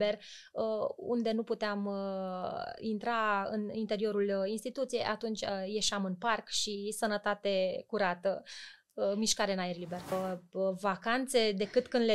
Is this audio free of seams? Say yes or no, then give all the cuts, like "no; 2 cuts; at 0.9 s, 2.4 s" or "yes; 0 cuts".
no; 1 cut; at 10.1 s